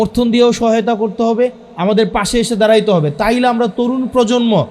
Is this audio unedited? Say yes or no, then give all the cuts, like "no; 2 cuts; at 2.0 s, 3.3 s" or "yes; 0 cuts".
yes; 0 cuts